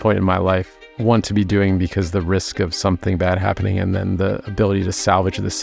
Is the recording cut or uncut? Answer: uncut